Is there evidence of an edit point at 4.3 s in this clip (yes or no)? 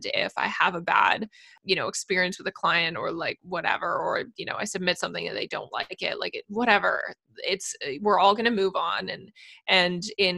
no